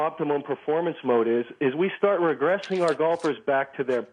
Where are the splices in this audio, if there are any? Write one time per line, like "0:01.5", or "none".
none

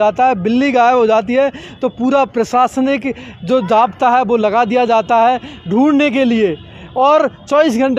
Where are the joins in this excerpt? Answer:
none

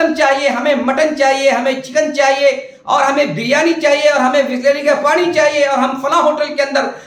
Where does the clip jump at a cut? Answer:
none

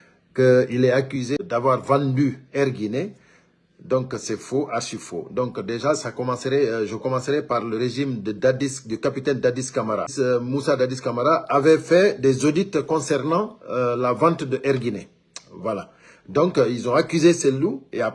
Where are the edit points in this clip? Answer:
0:01.3
0:10.1

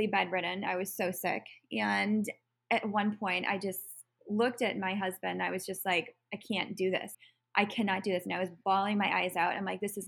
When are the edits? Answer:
0:07.1

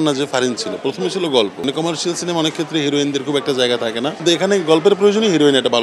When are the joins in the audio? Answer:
0:01.6
0:04.2

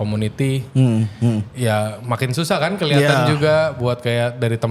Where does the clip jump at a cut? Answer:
none

